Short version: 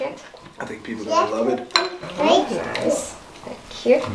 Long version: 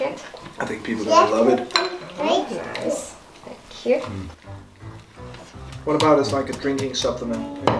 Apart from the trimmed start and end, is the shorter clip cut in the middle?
no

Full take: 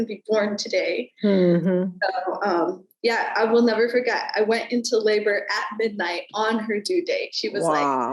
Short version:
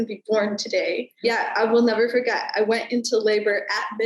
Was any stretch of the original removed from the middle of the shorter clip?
yes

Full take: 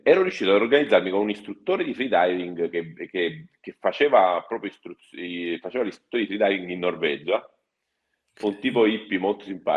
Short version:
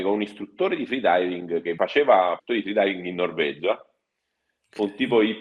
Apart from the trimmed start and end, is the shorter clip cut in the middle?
yes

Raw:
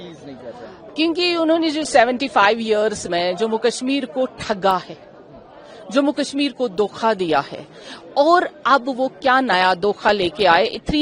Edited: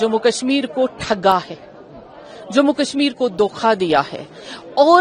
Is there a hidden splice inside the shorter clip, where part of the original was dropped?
no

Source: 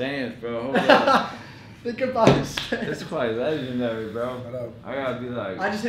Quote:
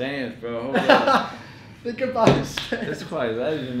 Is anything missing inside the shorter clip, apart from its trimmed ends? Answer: no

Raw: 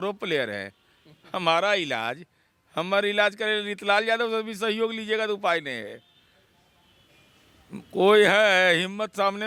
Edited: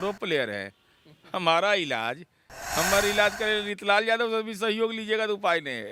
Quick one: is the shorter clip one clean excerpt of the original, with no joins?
yes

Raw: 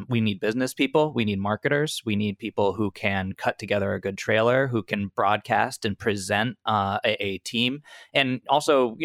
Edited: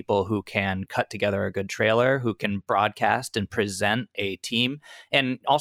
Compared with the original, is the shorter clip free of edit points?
no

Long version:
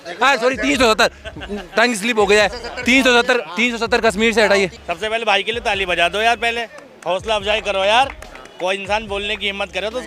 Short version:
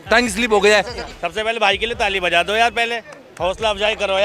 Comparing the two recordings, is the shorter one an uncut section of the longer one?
no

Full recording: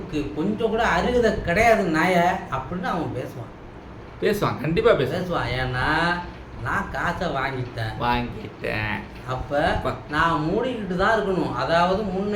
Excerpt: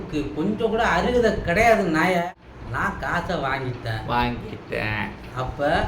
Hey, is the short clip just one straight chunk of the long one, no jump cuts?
no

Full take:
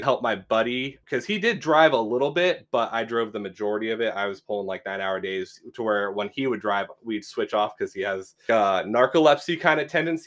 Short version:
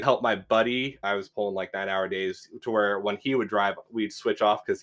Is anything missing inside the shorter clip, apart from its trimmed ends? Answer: yes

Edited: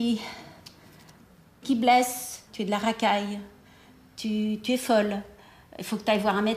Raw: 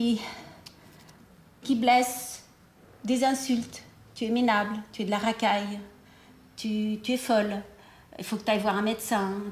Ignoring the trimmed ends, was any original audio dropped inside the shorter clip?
yes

